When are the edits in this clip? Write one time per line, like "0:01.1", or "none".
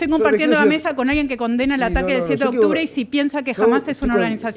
none